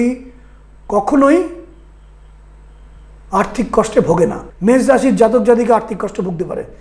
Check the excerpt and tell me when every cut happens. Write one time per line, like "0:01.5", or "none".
0:04.4